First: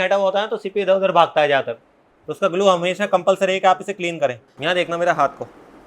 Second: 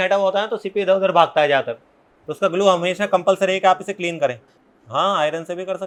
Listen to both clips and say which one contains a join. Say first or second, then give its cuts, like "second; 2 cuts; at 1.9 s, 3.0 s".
first; 1 cut; at 4.5 s